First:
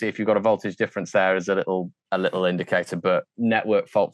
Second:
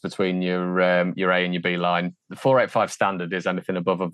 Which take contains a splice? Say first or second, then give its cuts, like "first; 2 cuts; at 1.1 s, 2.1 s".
first; 1 cut; at 2.0 s